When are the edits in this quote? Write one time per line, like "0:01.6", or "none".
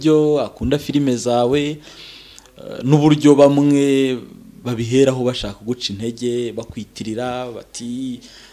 none

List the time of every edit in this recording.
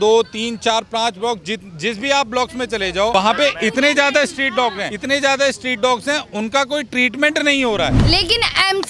0:03.1
0:04.9
0:08.0

